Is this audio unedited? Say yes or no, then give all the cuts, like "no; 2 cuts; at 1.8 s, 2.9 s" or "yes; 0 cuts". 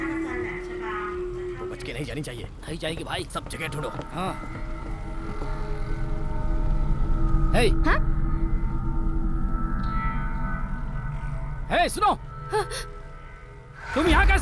no; 1 cut; at 1.8 s